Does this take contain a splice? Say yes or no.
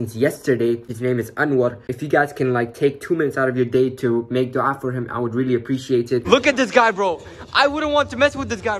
yes